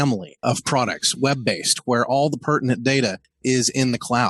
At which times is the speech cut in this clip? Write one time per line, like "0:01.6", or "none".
0:03.3